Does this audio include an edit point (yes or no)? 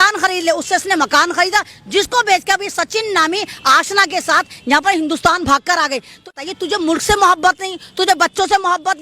yes